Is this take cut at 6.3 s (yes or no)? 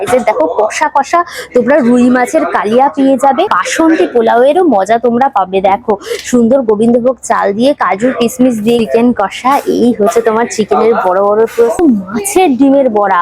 no